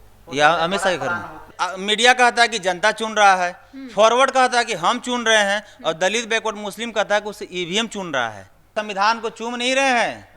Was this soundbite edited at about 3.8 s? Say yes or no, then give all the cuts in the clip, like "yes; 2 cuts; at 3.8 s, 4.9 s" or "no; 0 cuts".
no; 2 cuts; at 1.5 s, 8.7 s